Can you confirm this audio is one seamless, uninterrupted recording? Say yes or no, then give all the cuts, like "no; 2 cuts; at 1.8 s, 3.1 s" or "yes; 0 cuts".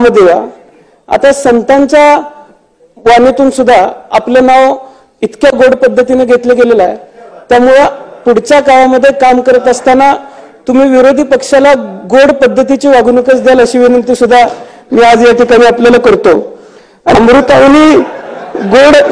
no; 1 cut; at 17.1 s